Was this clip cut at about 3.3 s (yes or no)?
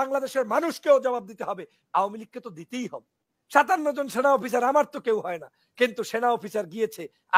yes